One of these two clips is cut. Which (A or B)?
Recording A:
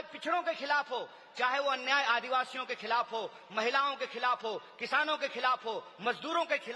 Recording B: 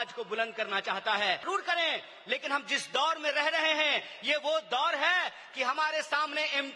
B